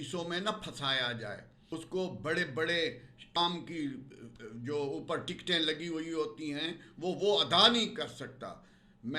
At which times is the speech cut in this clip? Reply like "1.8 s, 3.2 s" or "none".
1.5 s, 3.3 s